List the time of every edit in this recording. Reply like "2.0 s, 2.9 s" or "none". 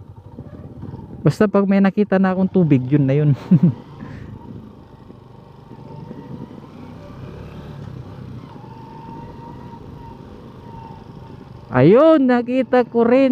none